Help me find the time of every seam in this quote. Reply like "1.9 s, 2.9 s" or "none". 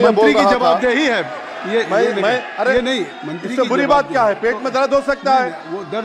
none